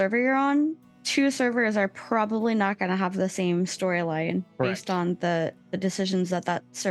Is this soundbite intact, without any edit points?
yes; 0 cuts

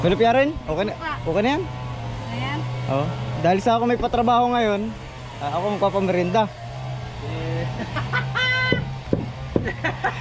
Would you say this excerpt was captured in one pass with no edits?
yes; 0 cuts

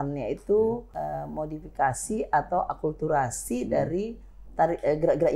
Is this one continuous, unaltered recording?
no; 1 cut; at 0.9 s

